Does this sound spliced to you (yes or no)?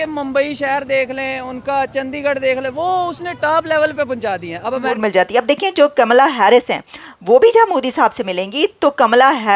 yes